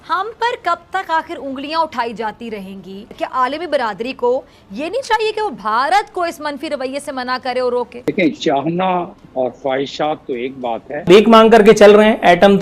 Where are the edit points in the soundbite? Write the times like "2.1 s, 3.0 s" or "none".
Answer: 3.1 s, 8.1 s, 11.1 s